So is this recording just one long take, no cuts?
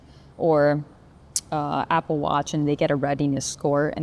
yes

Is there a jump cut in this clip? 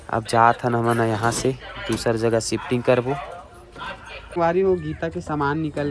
yes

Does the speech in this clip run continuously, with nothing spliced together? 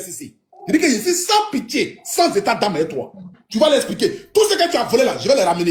yes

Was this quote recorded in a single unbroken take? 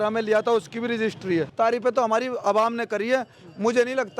no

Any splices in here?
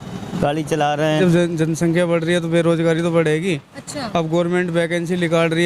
yes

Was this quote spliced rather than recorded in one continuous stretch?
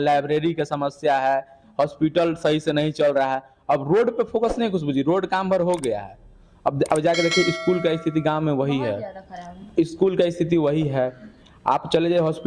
no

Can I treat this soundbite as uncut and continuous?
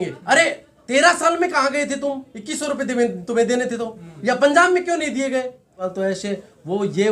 no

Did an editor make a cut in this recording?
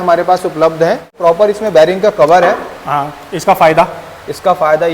yes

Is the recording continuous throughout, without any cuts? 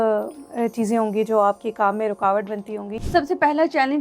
no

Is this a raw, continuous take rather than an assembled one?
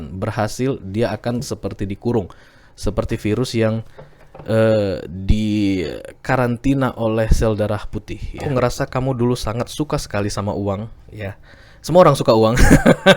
no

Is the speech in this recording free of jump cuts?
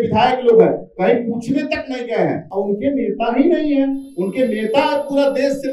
no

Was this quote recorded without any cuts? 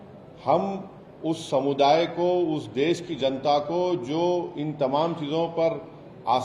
yes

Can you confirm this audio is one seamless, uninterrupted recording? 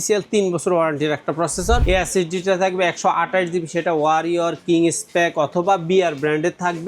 no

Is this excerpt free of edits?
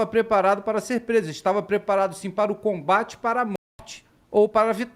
yes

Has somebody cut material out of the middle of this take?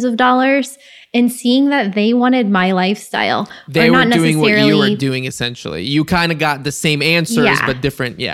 no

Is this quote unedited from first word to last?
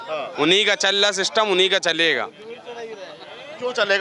yes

